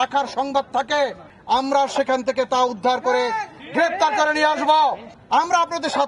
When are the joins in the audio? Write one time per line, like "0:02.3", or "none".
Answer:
0:01.3
0:05.1